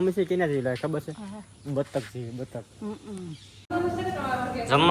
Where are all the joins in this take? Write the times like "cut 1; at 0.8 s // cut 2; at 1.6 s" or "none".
cut 1; at 3.7 s